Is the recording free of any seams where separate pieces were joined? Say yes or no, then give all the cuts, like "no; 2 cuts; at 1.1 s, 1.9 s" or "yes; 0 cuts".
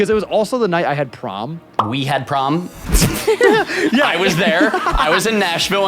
no; 2 cuts; at 2.0 s, 2.8 s